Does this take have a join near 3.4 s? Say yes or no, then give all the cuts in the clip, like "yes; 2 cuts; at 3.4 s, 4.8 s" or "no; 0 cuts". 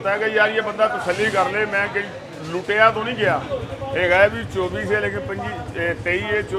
yes; 1 cut; at 3.4 s